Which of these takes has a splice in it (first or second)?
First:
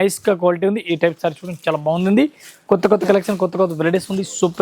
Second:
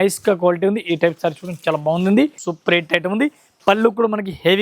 second